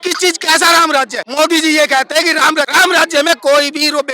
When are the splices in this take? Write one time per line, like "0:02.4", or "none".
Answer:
0:01.2
0:02.7